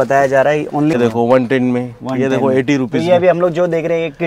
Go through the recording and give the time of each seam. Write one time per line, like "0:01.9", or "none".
0:01.0